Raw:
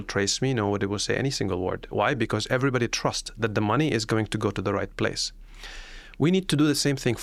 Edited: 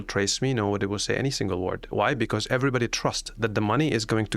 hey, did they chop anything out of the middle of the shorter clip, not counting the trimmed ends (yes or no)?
no